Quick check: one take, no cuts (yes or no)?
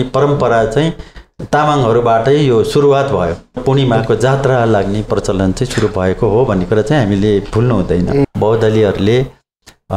no